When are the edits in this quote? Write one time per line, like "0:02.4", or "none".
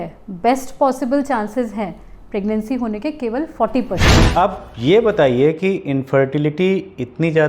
0:04.1